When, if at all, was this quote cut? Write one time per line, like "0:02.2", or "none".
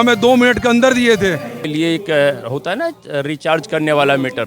0:01.6